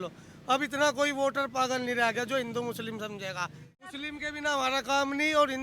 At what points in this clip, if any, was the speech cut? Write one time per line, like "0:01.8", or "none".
0:03.9